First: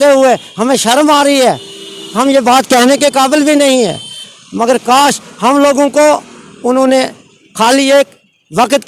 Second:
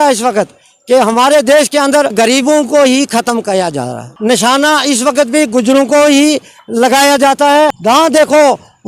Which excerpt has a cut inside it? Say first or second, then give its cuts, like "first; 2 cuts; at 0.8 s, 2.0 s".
second; 3 cuts; at 2.1 s, 4.1 s, 7.8 s